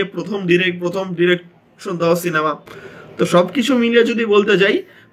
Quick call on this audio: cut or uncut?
uncut